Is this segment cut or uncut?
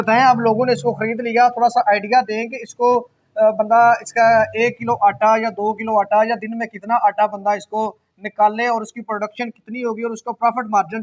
uncut